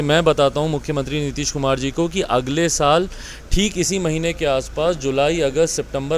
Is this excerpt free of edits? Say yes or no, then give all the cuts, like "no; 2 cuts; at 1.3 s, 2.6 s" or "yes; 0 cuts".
yes; 0 cuts